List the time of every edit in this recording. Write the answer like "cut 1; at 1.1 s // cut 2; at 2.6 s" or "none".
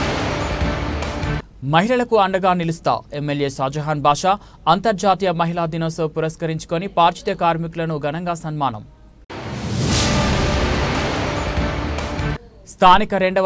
cut 1; at 1.2 s